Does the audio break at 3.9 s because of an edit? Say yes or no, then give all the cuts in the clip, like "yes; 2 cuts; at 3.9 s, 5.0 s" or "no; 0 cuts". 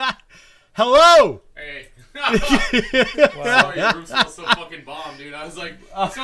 no; 0 cuts